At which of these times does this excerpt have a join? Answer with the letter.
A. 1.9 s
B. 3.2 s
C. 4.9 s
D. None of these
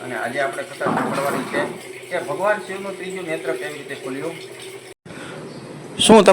C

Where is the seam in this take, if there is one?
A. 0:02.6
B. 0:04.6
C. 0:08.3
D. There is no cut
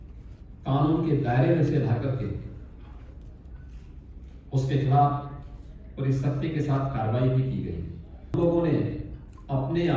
C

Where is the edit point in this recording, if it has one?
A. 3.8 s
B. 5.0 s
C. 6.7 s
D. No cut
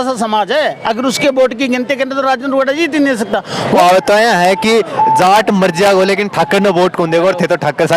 A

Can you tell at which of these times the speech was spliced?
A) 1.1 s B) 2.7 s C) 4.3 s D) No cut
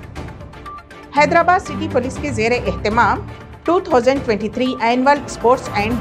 A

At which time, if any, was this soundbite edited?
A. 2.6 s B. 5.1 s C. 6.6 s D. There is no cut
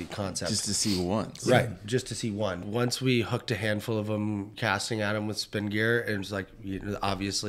A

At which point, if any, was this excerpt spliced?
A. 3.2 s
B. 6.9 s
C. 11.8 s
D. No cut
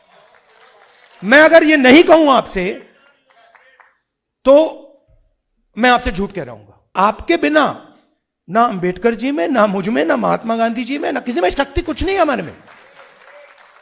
B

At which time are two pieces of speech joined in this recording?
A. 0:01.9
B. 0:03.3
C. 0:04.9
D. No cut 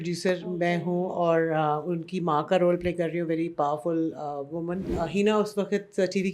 C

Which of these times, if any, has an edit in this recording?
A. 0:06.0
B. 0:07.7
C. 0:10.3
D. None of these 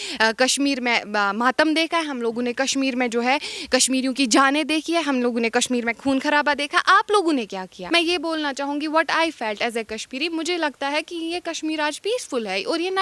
B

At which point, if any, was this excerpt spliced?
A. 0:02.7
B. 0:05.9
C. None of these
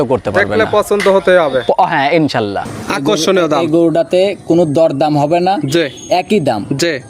A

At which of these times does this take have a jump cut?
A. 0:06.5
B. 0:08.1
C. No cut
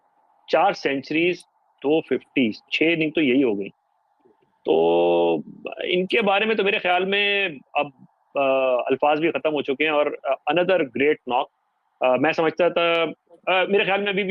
C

